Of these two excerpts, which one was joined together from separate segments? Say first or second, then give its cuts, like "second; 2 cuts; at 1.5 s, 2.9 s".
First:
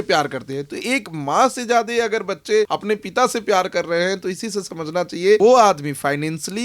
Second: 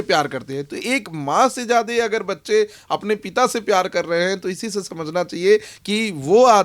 first; 2 cuts; at 2.7 s, 5.4 s